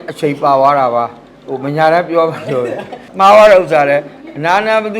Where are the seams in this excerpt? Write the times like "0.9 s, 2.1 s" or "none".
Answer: 3.0 s